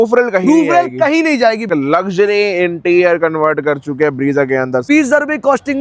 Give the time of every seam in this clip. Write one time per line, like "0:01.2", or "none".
0:01.7
0:04.8

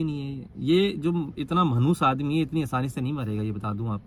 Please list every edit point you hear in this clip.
none

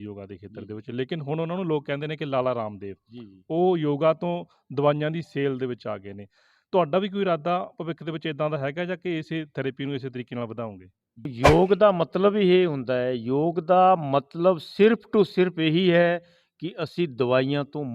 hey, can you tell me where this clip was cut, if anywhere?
0:11.3

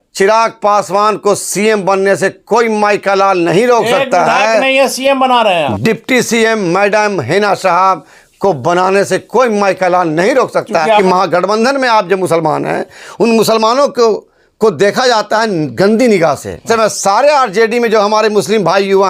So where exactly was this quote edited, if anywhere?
0:05.7
0:11.0
0:16.6

